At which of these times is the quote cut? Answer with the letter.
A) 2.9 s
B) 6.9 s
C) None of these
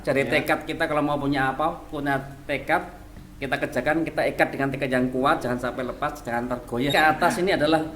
B